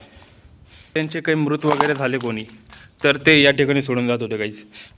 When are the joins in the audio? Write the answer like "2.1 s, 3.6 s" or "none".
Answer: 0.9 s